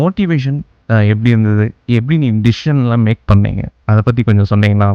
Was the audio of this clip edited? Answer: no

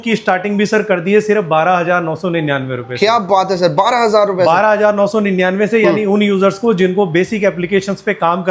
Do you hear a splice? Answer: no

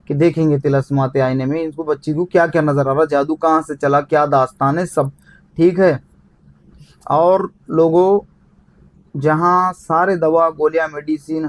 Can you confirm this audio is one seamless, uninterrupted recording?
yes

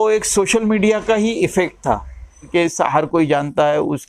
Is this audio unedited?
no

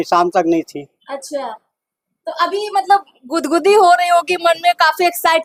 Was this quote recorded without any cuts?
yes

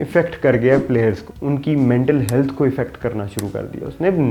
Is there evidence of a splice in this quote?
yes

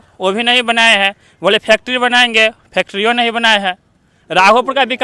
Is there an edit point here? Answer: no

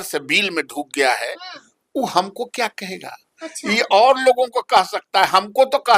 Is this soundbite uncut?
yes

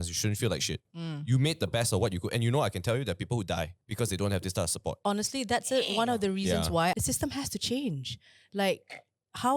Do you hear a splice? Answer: yes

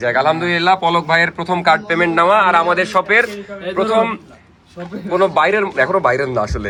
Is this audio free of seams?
yes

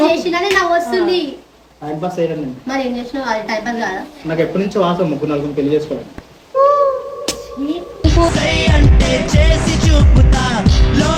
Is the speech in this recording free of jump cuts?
yes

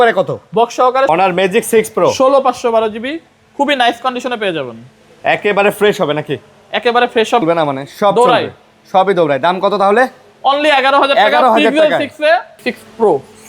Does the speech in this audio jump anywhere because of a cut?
yes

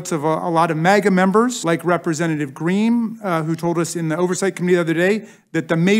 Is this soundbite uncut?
no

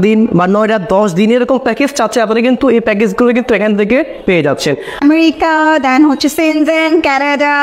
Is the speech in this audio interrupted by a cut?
yes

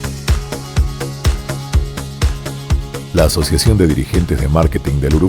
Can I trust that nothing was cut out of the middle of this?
no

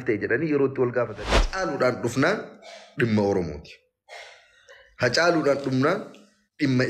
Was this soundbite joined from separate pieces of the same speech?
yes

